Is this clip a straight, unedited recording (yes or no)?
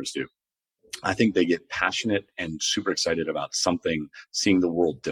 yes